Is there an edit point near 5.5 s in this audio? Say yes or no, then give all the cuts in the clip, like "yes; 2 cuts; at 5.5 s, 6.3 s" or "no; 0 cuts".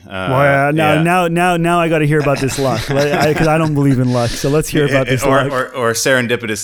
yes; 1 cut; at 5.5 s